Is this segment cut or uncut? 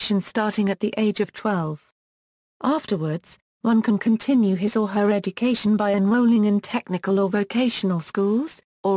cut